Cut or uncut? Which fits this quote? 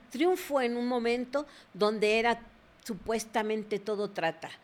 uncut